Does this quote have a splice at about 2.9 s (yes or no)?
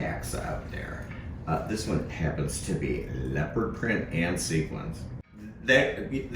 no